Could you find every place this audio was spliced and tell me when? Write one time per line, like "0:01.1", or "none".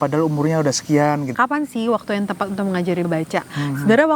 0:01.3
0:03.1

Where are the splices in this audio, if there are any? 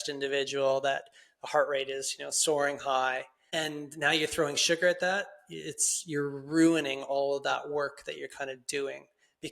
0:03.3

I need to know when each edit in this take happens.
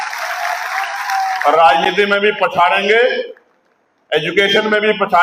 none

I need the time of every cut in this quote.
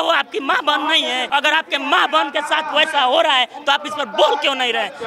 0:01.2

